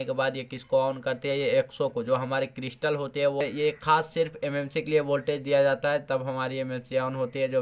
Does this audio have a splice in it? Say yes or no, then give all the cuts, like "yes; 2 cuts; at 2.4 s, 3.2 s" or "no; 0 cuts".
yes; 1 cut; at 3.4 s